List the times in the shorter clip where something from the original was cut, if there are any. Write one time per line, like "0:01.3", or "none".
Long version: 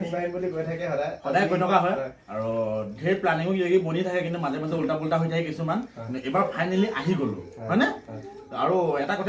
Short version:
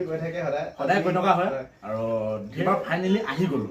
0:02.5

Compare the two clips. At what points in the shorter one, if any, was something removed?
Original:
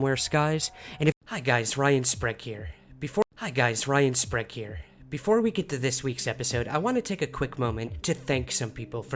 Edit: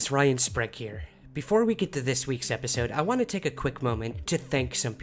0:01.6

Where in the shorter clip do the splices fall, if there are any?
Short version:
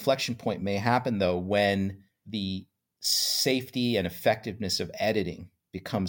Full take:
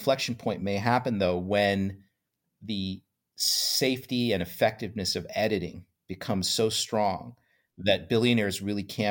0:02.1

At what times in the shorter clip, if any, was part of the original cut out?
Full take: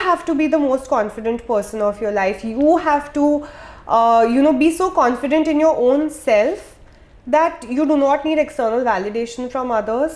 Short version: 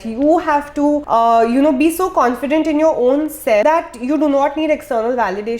0:01.0
0:03.6

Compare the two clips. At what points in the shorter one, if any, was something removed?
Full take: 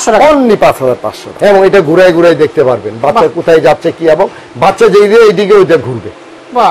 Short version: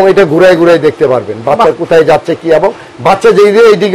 none

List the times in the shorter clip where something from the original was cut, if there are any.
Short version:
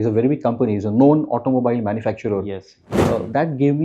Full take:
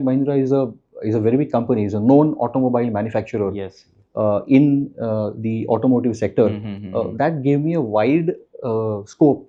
0:02.9

